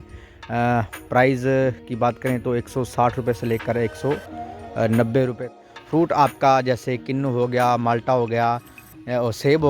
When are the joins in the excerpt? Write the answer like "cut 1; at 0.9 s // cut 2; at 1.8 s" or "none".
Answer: cut 1; at 5.5 s